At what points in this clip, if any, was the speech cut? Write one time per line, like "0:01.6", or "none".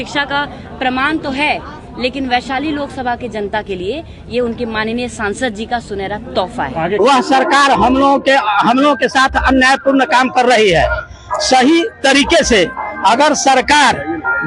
0:07.0